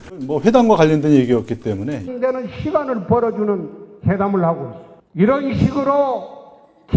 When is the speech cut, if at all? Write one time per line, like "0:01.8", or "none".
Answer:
none

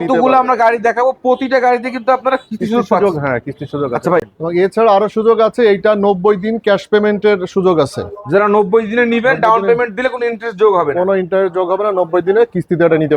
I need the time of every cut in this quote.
0:04.2

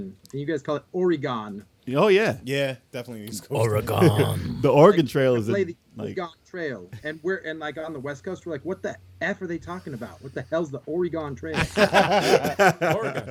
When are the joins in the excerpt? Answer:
none

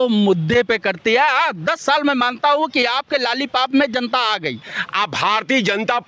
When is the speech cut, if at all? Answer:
0:04.8

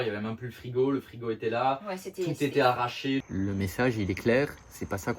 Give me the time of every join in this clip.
0:03.2

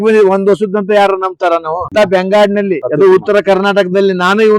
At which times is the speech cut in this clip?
0:01.9
0:02.8

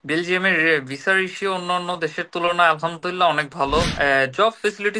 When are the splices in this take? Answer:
0:03.9

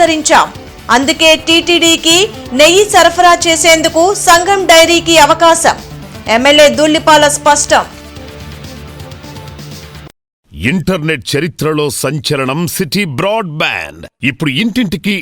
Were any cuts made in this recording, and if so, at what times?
0:10.5

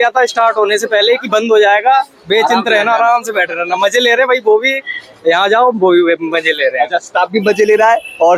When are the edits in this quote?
none

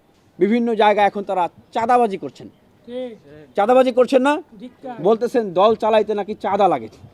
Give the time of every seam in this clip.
none

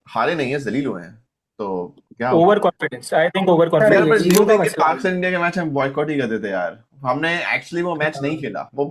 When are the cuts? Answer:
0:03.8

